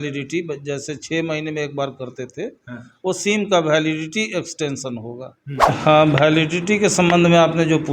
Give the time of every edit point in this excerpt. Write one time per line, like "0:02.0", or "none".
0:05.6